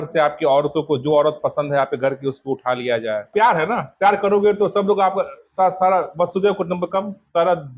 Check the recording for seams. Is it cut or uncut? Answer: cut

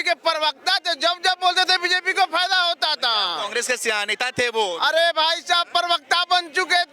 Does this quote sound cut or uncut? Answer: uncut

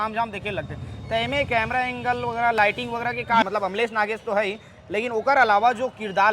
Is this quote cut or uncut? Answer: cut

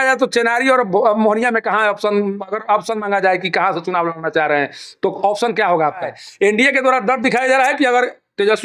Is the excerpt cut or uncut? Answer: cut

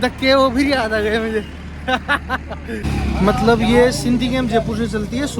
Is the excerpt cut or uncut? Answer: cut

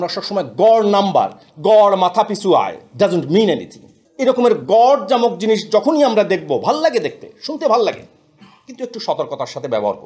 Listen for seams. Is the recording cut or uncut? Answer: uncut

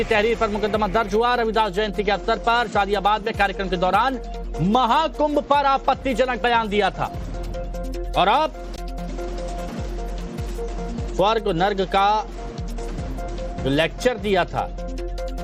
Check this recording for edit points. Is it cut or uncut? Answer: uncut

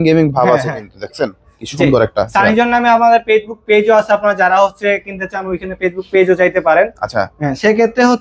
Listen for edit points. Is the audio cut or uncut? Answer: uncut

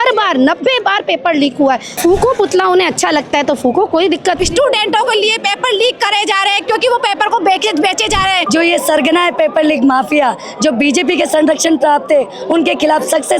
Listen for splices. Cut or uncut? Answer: cut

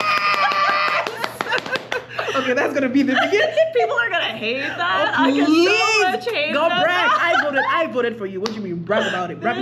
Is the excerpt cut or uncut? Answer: uncut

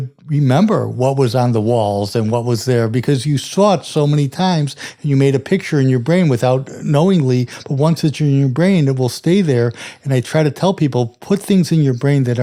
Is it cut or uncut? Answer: uncut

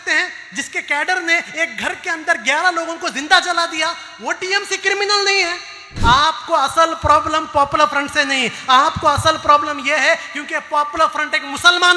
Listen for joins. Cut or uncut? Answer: cut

